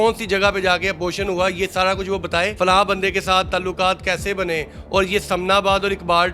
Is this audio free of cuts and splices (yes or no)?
no